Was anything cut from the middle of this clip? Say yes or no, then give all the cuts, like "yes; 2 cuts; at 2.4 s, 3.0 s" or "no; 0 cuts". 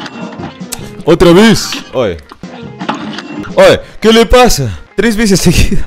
yes; 1 cut; at 3.4 s